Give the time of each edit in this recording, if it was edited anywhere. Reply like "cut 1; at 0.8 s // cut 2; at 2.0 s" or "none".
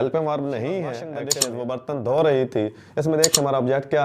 cut 1; at 1.2 s